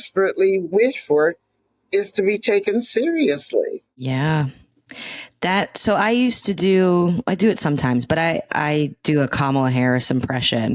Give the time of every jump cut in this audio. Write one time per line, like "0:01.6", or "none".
none